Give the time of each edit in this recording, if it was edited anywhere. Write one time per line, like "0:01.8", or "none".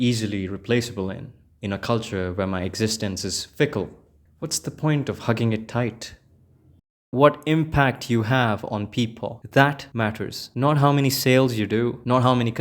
0:06.8